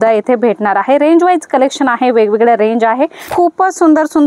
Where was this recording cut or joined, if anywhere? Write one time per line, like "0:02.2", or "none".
0:03.2